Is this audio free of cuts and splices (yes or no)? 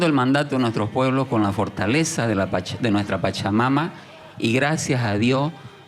yes